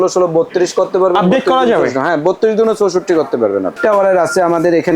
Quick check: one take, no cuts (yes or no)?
no